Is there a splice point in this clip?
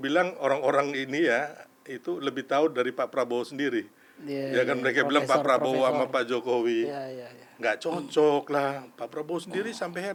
no; 0 cuts

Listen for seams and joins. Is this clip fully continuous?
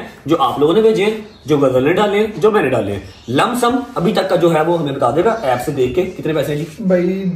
yes; 0 cuts

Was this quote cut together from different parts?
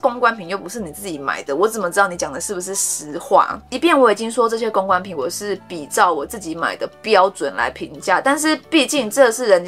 no; 0 cuts

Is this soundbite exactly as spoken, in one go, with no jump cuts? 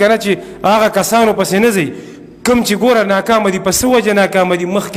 yes; 0 cuts

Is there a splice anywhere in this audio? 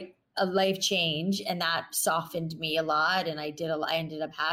no; 0 cuts

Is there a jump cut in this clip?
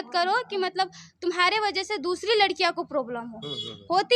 no; 0 cuts

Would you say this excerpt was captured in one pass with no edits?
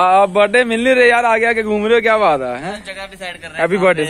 yes; 0 cuts

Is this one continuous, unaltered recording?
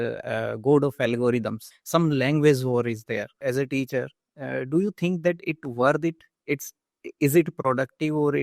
no; 2 cuts; at 1.7 s, 3.4 s

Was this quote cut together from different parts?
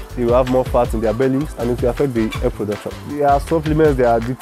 yes; 2 cuts; at 1.5 s, 3.0 s

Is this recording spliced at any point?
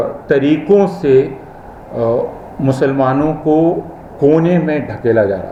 no; 0 cuts

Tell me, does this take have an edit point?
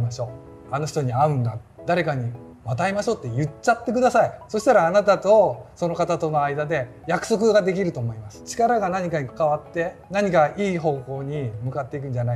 yes; 3 cuts; at 1.6 s, 8.4 s, 9.3 s

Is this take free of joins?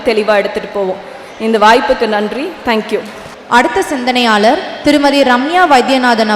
yes; 0 cuts

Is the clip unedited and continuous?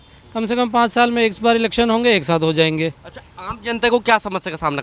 yes; 0 cuts

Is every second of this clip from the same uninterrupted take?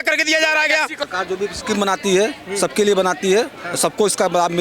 no; 1 cut; at 1.0 s

